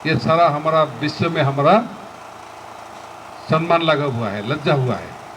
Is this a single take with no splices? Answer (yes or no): yes